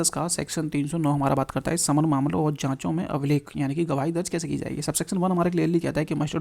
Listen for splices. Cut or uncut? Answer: uncut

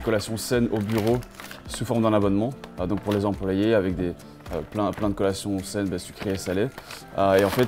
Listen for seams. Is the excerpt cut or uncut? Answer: uncut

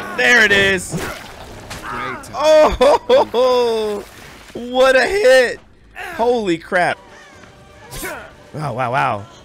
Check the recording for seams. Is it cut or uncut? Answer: cut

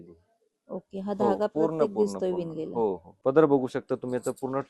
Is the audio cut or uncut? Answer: cut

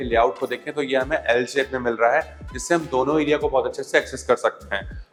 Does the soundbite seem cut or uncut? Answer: uncut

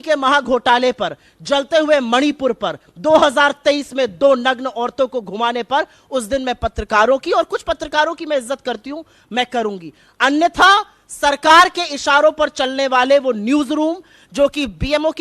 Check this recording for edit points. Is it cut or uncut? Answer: uncut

